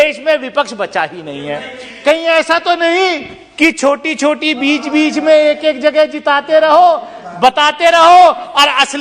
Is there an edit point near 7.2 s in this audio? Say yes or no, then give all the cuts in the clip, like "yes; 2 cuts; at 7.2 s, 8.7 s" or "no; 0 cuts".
no; 1 cut; at 1.8 s